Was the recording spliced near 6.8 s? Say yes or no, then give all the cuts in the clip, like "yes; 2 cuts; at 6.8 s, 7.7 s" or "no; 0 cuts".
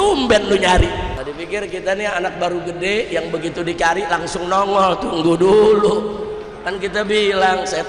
no; 1 cut; at 1.2 s